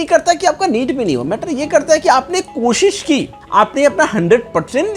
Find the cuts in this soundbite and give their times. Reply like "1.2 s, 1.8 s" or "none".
3.4 s